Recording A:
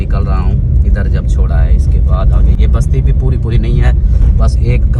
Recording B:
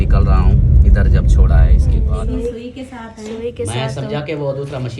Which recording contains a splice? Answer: B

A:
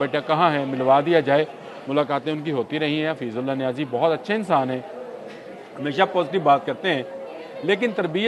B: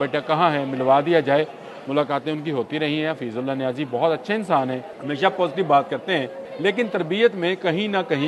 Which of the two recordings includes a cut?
B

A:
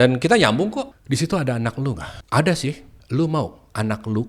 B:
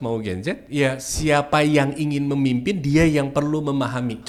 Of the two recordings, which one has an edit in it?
A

